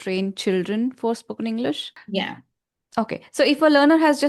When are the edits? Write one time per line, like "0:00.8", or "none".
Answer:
0:01.9